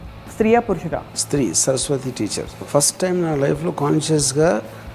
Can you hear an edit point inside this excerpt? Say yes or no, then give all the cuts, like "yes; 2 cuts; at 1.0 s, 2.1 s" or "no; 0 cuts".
yes; 2 cuts; at 1.1 s, 2.6 s